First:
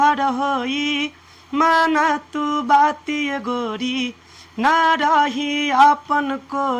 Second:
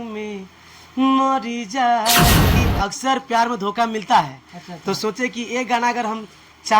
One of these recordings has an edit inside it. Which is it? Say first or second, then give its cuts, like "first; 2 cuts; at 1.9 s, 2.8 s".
second; 1 cut; at 2.6 s